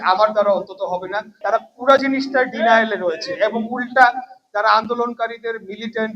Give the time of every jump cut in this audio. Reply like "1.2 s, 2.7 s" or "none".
1.3 s